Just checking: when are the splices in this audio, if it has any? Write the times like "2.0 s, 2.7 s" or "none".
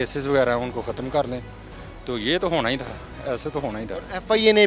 none